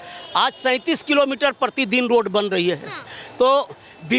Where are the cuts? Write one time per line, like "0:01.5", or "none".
none